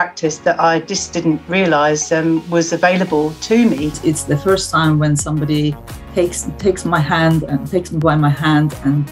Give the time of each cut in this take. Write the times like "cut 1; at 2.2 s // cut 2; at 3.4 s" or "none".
cut 1; at 4.0 s